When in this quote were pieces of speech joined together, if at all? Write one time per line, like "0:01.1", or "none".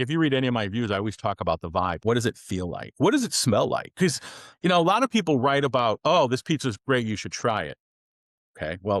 0:02.0